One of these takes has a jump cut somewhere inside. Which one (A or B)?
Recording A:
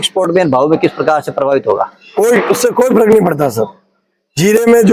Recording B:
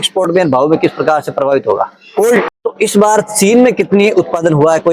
B